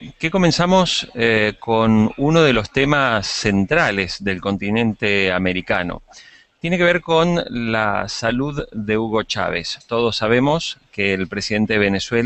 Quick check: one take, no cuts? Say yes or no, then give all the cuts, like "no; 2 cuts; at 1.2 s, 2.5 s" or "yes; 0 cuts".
yes; 0 cuts